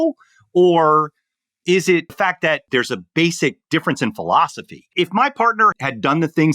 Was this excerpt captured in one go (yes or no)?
no